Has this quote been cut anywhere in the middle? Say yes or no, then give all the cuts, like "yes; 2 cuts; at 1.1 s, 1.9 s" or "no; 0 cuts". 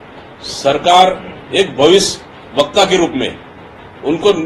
no; 0 cuts